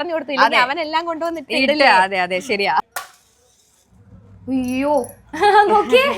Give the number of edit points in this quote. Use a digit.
1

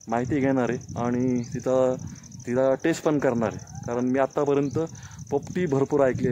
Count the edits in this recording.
0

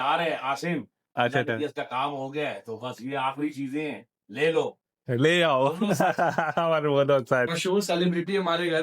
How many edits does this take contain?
1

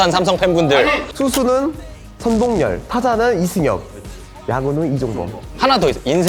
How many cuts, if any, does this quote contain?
1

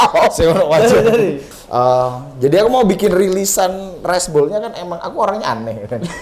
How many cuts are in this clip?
1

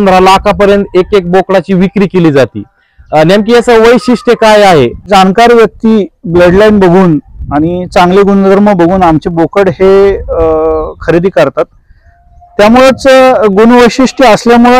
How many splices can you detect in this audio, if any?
1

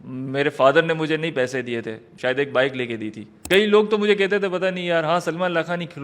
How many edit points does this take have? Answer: 2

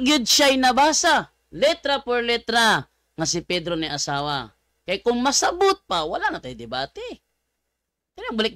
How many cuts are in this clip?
0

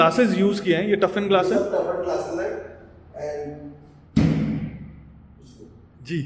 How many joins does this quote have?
0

